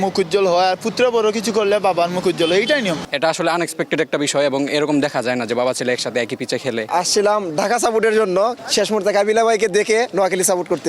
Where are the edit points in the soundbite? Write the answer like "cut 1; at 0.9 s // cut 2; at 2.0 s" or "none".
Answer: cut 1; at 3.1 s // cut 2; at 6.9 s // cut 3; at 8.6 s